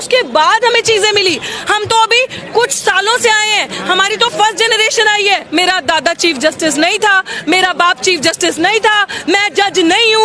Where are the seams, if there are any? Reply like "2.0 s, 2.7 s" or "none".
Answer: 5.4 s